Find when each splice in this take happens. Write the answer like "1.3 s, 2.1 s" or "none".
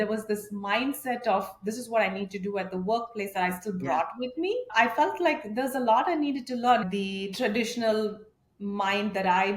4.7 s, 6.8 s